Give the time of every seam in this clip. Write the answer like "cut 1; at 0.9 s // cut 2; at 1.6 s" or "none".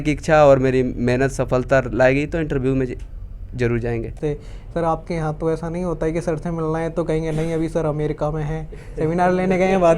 cut 1; at 4.2 s